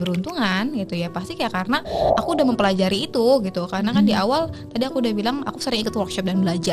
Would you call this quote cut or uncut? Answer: uncut